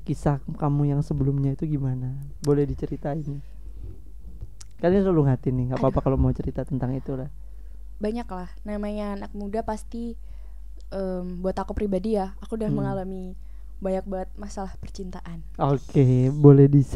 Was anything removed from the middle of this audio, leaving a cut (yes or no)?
no